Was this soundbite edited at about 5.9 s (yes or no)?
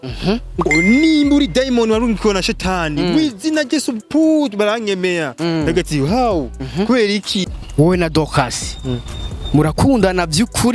no